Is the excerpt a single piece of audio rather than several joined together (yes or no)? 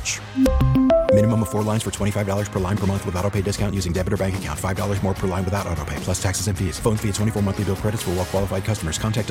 yes